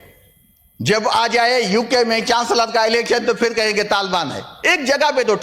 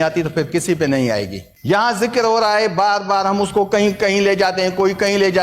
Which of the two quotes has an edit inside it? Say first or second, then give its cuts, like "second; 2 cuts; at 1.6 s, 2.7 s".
second; 1 cut; at 1.5 s